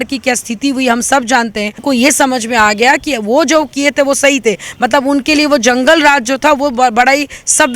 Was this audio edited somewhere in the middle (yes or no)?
yes